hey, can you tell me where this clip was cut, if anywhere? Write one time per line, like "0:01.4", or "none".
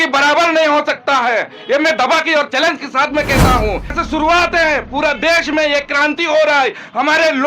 0:04.0

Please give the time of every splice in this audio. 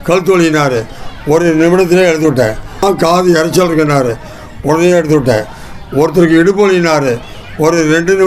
0:02.8

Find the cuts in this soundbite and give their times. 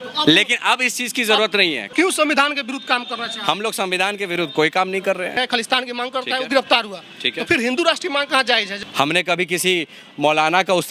0:01.9
0:05.4
0:08.8

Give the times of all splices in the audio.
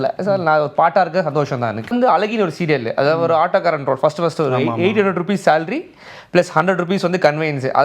0:01.9

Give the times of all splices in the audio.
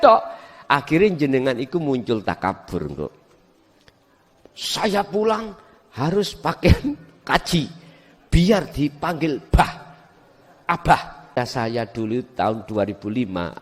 0:11.3

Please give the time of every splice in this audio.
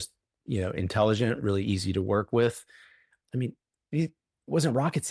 0:03.2

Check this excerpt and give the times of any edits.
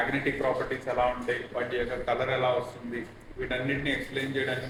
none

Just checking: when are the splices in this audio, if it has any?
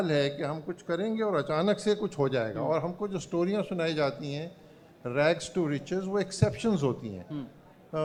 none

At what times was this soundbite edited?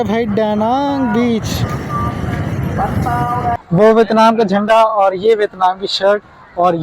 0:03.5

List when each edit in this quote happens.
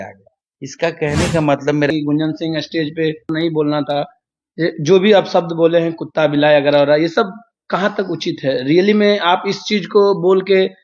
0:01.9
0:03.3

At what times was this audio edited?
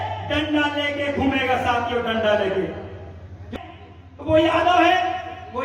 0:03.4

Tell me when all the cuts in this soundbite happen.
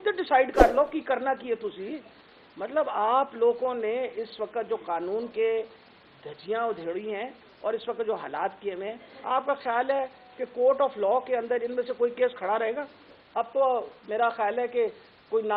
0:13.1

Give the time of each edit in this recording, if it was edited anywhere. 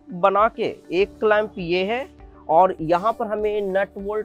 none

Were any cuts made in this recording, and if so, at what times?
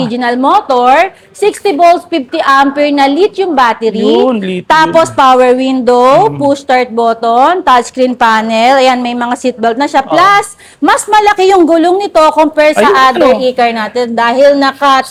none

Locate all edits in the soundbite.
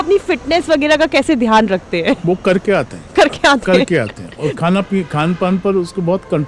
none

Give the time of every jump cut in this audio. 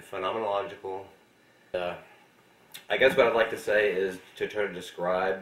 none

